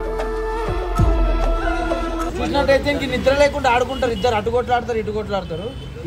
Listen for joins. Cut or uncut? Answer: cut